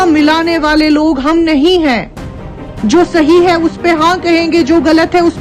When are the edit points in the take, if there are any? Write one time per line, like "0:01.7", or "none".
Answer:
none